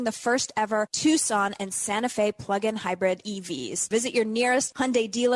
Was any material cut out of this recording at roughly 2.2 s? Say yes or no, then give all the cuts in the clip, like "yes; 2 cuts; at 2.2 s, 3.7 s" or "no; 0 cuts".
no; 1 cut; at 3.8 s